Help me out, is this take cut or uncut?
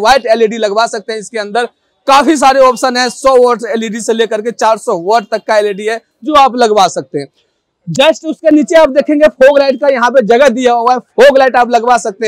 uncut